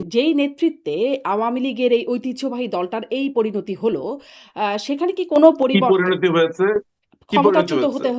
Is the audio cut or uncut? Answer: uncut